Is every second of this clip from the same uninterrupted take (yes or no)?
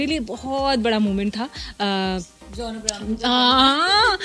yes